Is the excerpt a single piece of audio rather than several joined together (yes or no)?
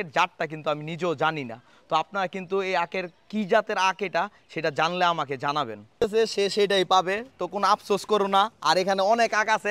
no